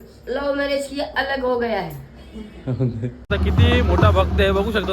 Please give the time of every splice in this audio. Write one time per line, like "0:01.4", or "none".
0:03.3